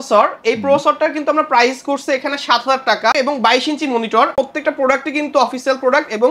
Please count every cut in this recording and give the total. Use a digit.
2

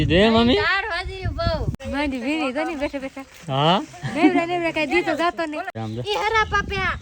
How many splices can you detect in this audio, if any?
2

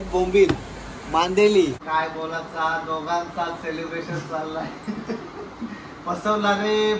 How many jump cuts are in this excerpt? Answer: 1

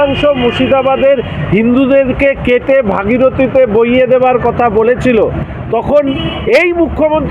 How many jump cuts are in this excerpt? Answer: 0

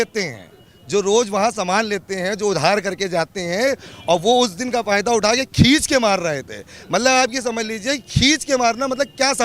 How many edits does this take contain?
0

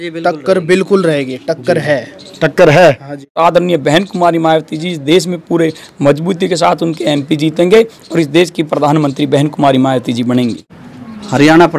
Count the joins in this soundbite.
2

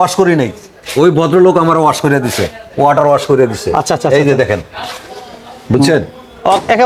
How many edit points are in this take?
0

